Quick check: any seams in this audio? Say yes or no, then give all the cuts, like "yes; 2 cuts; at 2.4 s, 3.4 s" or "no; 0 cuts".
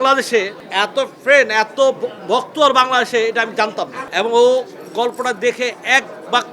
yes; 1 cut; at 4.0 s